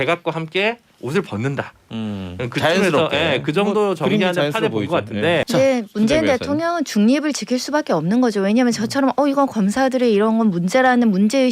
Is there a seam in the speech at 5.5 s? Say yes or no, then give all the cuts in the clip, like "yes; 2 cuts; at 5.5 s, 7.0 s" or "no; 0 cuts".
yes; 1 cut; at 5.5 s